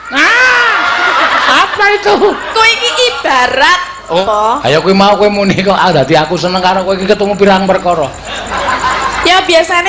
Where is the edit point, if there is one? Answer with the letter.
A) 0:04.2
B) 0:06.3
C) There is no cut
A